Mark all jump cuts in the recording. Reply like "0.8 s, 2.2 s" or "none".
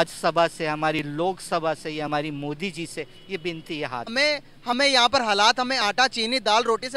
4.1 s